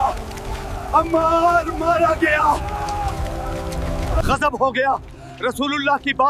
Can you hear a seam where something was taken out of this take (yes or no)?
no